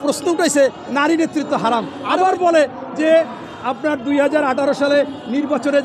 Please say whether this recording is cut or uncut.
cut